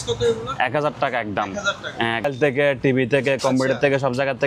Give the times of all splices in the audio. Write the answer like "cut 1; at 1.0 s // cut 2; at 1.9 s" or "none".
cut 1; at 2.2 s